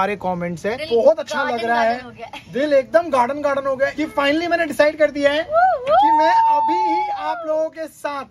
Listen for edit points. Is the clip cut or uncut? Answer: cut